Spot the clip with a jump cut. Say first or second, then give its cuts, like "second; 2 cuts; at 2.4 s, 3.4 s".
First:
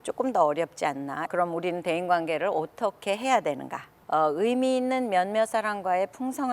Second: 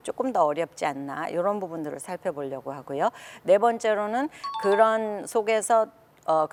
first; 2 cuts; at 1.3 s, 4.0 s